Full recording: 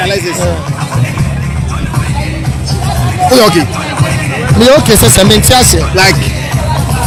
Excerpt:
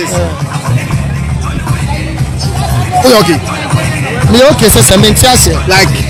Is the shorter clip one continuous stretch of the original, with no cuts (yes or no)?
yes